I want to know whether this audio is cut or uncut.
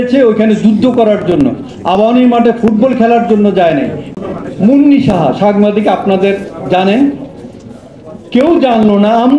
cut